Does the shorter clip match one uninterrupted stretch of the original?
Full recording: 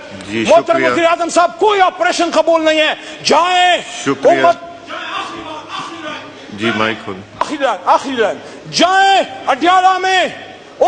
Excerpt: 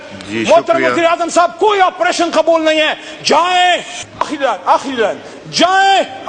no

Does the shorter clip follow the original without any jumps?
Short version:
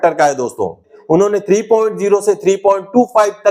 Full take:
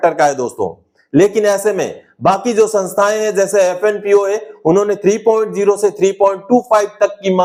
no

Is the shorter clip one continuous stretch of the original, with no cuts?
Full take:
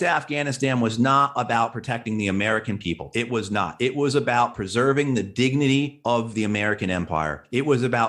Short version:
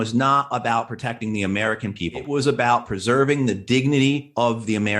no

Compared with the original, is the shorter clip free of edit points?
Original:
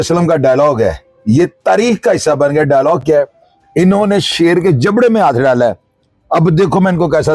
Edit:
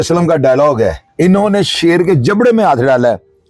no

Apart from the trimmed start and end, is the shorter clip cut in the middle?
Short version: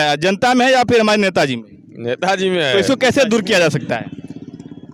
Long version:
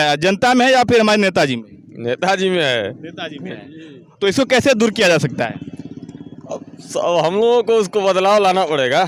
yes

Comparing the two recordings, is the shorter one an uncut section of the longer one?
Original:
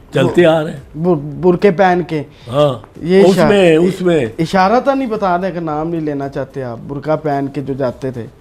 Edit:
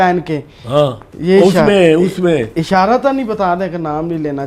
yes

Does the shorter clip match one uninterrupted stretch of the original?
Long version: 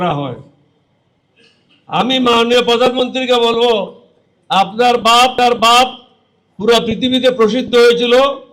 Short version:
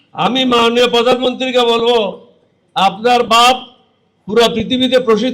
no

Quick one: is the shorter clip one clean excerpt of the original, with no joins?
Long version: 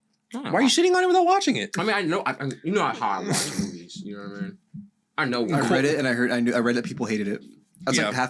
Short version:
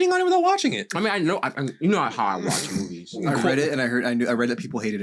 no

